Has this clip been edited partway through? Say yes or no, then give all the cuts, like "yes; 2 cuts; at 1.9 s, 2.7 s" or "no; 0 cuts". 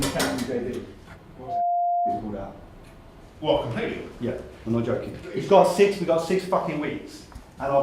yes; 2 cuts; at 4.1 s, 5.2 s